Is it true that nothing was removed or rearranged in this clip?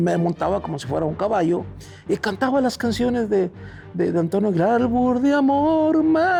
yes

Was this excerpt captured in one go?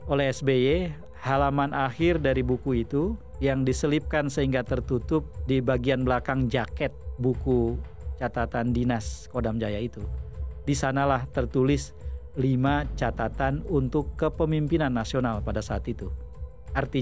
yes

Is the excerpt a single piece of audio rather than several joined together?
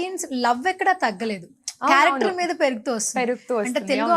yes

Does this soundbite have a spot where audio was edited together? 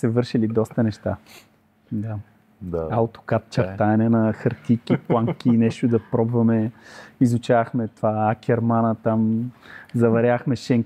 no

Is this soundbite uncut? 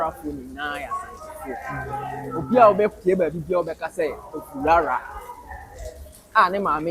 yes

